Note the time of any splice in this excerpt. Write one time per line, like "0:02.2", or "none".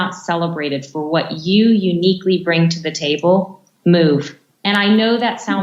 none